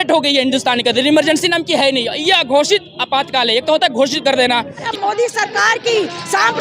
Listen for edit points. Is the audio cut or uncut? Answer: cut